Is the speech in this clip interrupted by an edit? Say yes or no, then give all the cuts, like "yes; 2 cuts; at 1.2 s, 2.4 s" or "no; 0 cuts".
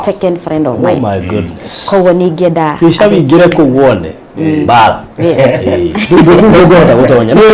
no; 0 cuts